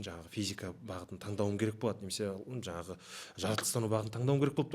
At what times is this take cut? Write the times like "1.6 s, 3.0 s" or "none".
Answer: none